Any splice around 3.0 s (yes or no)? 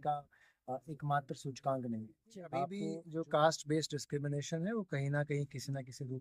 yes